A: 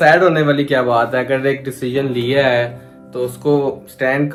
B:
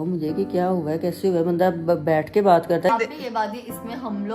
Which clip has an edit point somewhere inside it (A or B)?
B